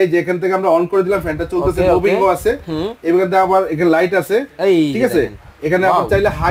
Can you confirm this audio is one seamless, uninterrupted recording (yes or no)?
yes